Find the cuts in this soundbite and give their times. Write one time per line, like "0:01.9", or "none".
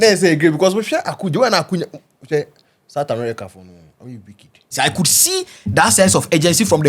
0:04.7

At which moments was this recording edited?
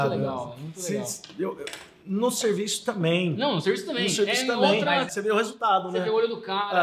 0:05.1

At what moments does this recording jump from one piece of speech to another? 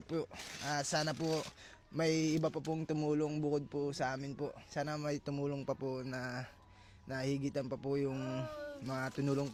none

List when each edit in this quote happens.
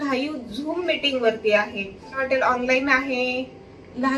0:02.2

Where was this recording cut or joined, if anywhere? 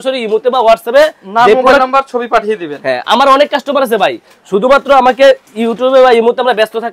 none

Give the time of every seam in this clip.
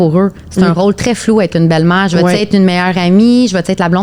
none

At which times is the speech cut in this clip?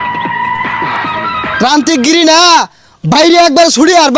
0:01.5

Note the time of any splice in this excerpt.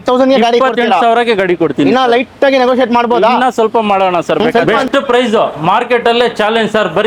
0:04.7

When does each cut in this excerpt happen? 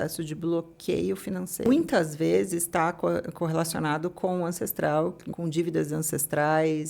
0:01.7
0:05.3

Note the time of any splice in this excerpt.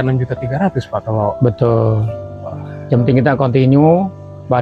none

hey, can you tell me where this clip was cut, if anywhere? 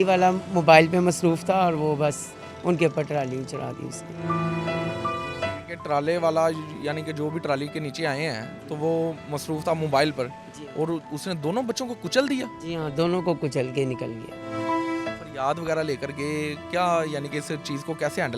none

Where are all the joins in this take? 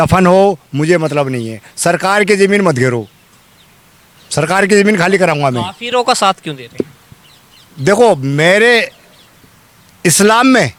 none

